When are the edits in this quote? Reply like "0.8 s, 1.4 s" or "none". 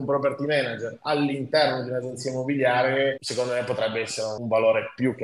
none

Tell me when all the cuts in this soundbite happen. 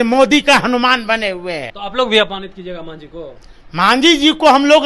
1.7 s

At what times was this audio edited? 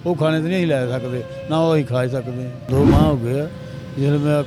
none

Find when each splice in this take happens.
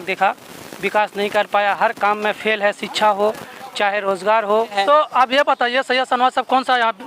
4.7 s

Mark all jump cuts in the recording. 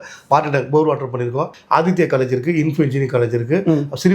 1.6 s

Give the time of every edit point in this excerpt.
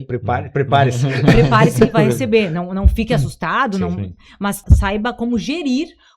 4.6 s

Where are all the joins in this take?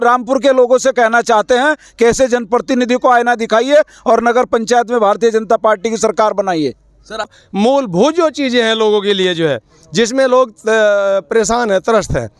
7.4 s

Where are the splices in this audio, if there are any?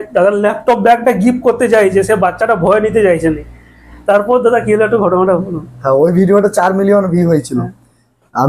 none

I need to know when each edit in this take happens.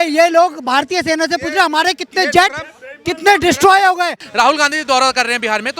4.2 s

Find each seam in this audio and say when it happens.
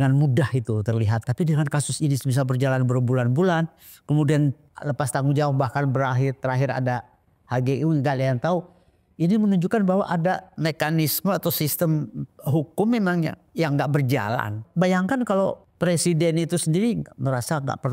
1.2 s, 4.7 s, 10.5 s, 14.6 s, 15.6 s

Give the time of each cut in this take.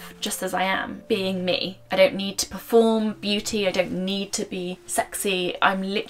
1.0 s, 1.8 s, 4.8 s

